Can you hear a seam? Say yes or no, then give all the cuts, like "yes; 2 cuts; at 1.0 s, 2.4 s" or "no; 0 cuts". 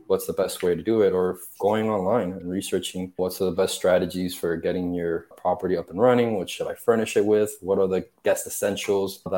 no; 0 cuts